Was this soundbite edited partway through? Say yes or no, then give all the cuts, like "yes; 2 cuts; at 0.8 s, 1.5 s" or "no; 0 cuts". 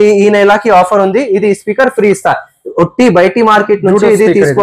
no; 0 cuts